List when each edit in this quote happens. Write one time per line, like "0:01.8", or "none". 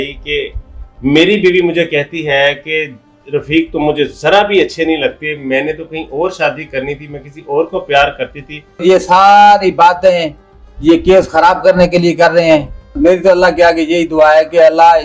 0:08.8
0:13.0